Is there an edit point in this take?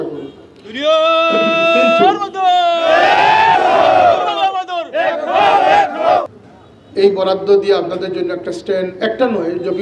yes; 1 cut; at 6.3 s

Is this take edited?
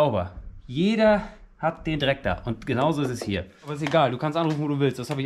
yes; 1 cut; at 3.8 s

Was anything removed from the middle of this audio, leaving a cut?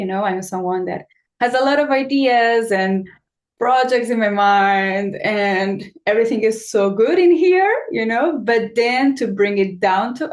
no; 0 cuts

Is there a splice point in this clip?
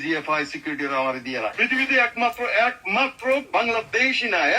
yes; 1 cut; at 1.6 s

